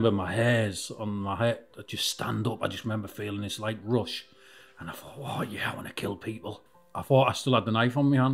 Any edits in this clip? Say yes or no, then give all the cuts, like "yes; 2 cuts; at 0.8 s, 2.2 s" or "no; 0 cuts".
yes; 1 cut; at 6.7 s